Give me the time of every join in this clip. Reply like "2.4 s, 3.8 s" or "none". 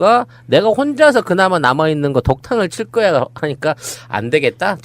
1.6 s